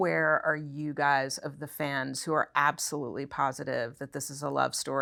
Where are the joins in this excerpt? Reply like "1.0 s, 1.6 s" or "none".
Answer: none